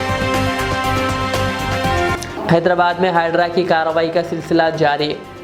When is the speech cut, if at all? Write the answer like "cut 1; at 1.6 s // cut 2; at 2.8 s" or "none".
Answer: cut 1; at 2.3 s